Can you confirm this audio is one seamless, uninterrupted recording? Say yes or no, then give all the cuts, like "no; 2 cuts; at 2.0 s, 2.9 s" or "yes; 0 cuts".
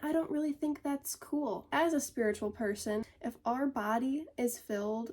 no; 2 cuts; at 1.7 s, 3.0 s